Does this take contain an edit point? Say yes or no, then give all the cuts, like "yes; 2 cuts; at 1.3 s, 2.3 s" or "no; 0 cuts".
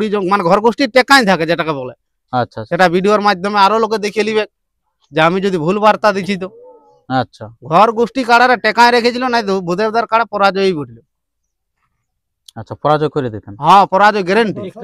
no; 0 cuts